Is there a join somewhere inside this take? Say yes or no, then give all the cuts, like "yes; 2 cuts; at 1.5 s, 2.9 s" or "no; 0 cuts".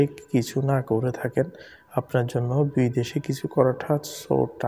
no; 0 cuts